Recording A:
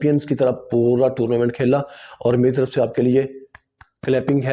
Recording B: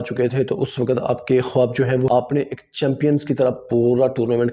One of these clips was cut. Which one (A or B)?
B